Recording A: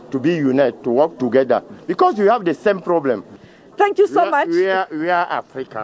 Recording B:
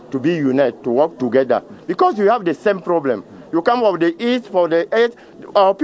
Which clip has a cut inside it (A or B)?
A